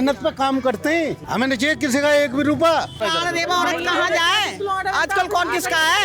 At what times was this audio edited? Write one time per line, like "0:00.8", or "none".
0:01.2
0:03.0